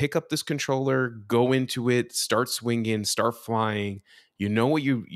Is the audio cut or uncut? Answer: uncut